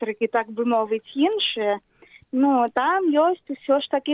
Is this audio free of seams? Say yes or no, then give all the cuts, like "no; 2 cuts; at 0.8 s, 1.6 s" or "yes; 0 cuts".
yes; 0 cuts